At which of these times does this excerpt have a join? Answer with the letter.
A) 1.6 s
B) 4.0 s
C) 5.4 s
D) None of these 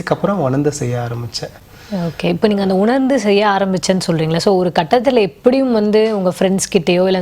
D